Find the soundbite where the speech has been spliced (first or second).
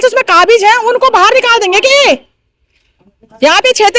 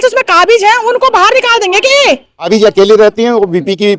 second